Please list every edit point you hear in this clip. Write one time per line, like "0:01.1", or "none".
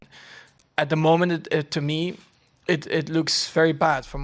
none

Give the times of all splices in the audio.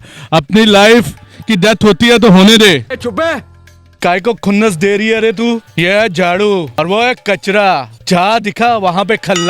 0:03.9
0:05.7
0:06.7
0:07.9

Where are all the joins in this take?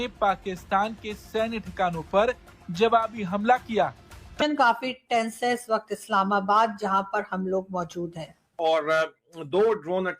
0:04.2

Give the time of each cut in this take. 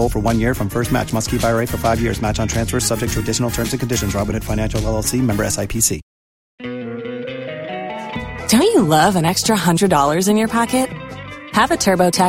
0:06.6

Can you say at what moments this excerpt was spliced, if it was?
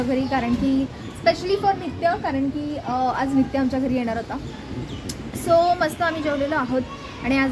none

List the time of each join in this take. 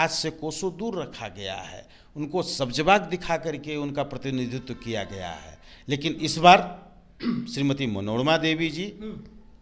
none

